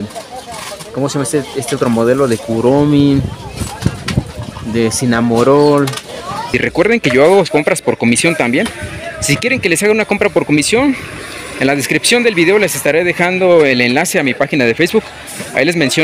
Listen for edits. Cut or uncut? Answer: cut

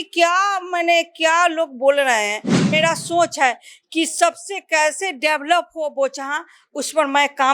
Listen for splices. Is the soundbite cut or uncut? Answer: cut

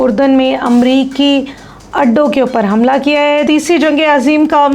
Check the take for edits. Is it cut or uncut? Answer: cut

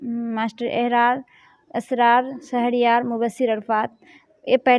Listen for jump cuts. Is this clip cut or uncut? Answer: uncut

